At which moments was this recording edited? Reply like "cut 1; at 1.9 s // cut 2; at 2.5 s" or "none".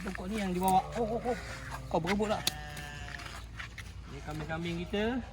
none